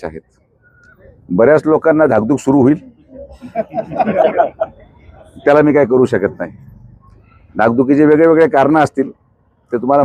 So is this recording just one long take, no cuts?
yes; 0 cuts

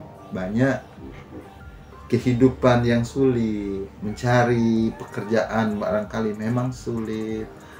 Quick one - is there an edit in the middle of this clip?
no; 0 cuts

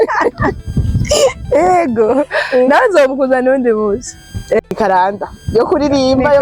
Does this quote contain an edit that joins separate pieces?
yes; 1 cut; at 4.8 s

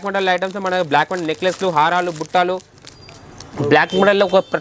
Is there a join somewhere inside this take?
no; 0 cuts

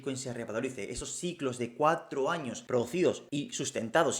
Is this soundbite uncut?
no; 2 cuts; at 2.5 s, 3.2 s

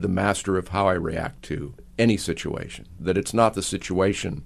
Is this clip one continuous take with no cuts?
no; 2 cuts; at 1.8 s, 3.0 s

